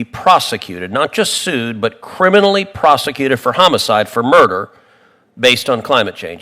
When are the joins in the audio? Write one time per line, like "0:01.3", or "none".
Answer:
none